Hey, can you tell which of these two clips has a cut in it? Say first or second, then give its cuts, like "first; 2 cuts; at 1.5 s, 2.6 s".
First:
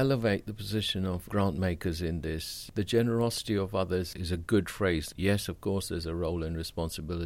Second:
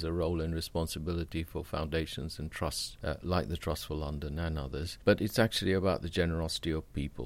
first; 3 cuts; at 1.2 s, 2.6 s, 5.1 s